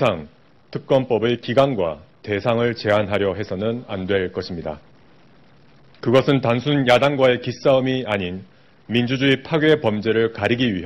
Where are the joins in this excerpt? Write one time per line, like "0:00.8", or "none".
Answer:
0:02.4